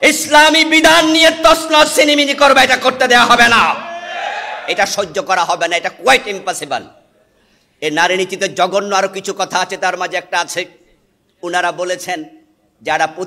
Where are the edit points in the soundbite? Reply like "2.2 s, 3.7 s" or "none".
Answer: none